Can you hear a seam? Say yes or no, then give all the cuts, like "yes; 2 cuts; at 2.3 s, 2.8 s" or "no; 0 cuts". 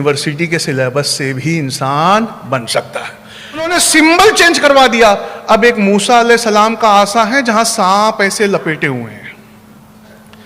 yes; 1 cut; at 3.7 s